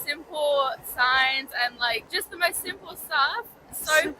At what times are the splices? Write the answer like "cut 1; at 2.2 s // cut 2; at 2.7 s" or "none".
cut 1; at 2.1 s

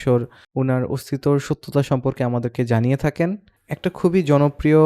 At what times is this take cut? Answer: cut 1; at 3.5 s

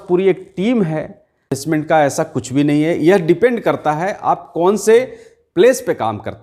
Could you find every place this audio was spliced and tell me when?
cut 1; at 1.6 s

